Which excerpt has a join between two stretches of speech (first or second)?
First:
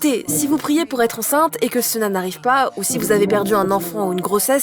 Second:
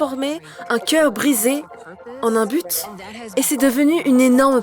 second